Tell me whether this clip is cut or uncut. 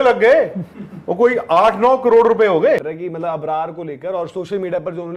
cut